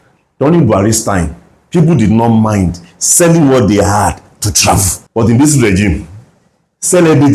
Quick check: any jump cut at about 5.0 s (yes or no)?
yes